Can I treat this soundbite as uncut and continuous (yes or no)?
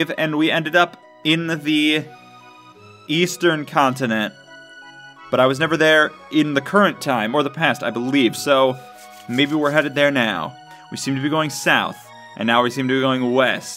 yes